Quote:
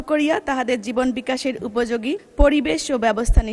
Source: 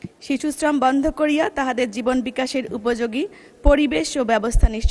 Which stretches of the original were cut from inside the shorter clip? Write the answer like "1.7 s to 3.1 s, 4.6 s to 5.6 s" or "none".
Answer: 3.4 s to 3.5 s